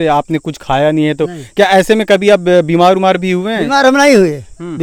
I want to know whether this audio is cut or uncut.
uncut